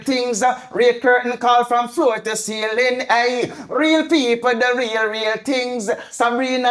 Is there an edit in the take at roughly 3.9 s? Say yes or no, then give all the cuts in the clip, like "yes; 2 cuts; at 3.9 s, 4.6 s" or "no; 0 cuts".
no; 0 cuts